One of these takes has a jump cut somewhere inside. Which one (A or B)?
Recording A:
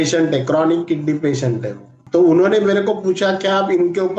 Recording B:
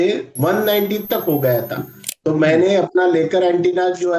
A